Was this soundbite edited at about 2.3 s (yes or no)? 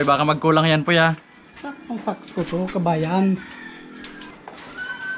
no